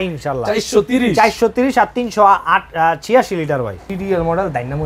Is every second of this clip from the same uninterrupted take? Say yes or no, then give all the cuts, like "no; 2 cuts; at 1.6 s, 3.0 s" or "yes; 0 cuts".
no; 1 cut; at 3.8 s